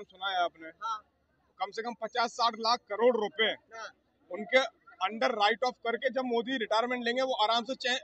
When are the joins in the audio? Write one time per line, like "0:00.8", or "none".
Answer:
none